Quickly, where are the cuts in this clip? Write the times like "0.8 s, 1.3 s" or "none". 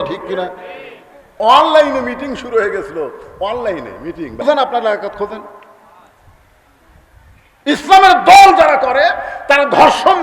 4.4 s